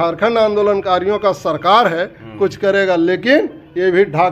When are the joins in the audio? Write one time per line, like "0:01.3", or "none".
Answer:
none